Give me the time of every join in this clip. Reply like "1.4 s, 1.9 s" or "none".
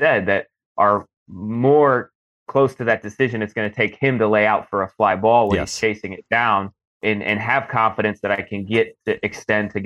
6.8 s